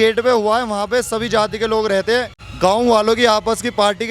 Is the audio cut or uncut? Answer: cut